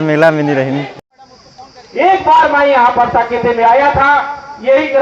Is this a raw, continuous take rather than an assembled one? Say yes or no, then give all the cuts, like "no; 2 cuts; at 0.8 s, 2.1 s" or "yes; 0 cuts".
no; 1 cut; at 1.0 s